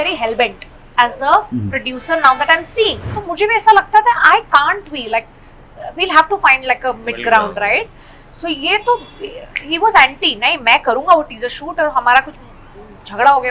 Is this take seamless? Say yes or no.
no